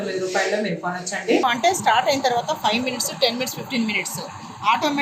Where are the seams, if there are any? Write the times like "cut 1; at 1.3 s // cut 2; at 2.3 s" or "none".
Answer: cut 1; at 1.4 s